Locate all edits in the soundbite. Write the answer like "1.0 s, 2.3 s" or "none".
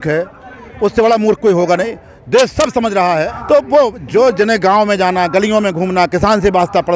3.3 s

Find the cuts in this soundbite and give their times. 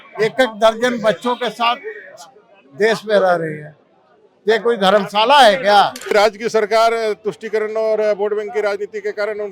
6.1 s

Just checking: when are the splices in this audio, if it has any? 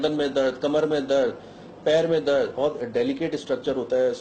none

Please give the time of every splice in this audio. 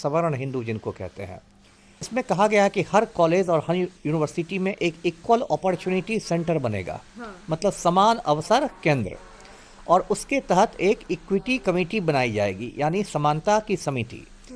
2.1 s

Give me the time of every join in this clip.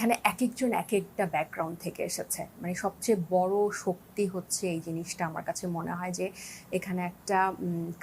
none

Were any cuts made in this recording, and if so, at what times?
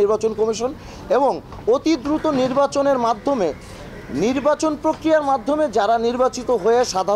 none

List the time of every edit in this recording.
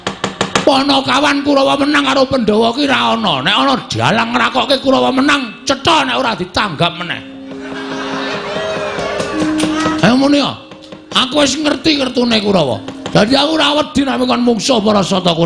none

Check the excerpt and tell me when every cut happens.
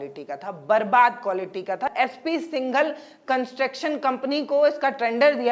1.9 s

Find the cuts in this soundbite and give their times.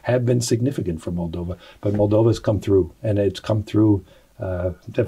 none

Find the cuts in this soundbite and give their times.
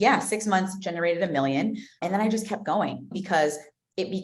2.0 s, 3.1 s

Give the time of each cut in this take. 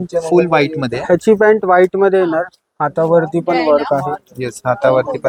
none

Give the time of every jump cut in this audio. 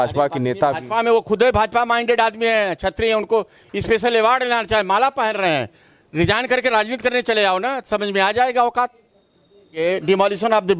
9.8 s

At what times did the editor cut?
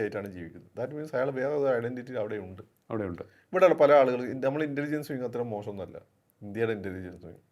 none

